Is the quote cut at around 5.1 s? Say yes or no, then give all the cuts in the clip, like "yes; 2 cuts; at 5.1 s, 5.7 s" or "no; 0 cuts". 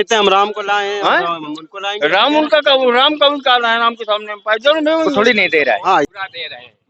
yes; 1 cut; at 5.1 s